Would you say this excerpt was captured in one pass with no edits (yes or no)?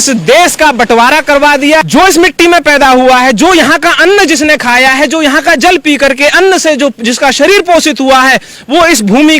no